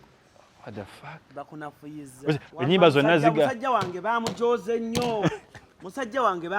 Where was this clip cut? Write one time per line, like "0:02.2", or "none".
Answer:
0:02.5